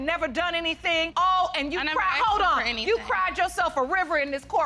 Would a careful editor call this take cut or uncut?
cut